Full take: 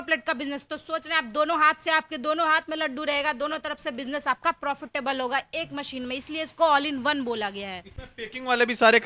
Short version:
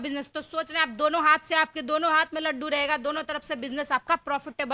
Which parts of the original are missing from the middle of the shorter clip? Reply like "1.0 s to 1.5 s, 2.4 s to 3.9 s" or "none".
none